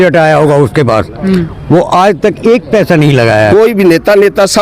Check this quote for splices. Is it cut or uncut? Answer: cut